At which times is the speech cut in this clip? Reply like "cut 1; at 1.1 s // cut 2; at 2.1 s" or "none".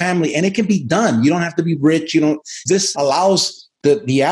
cut 1; at 2.7 s